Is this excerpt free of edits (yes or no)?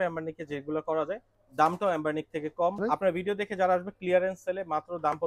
no